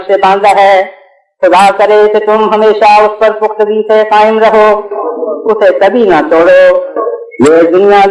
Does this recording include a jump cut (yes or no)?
no